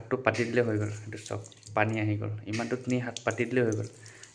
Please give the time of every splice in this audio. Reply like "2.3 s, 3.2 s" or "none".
none